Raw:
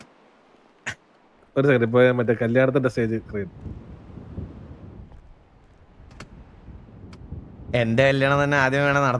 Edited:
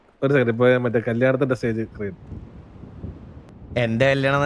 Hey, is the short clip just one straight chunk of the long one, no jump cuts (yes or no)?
no